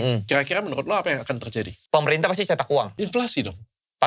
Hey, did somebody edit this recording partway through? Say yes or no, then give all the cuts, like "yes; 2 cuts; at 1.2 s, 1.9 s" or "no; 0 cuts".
yes; 2 cuts; at 1.8 s, 2.9 s